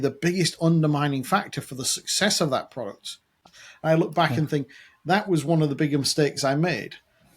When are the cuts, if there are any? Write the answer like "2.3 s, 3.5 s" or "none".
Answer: 3.4 s